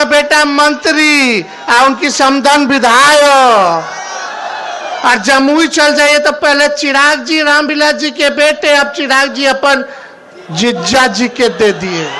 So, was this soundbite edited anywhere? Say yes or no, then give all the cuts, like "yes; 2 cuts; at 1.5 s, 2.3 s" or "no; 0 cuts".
no; 0 cuts